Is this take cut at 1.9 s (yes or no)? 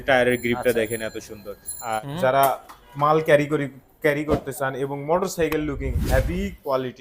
yes